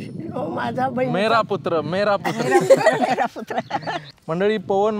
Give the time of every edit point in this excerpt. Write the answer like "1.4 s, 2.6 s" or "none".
none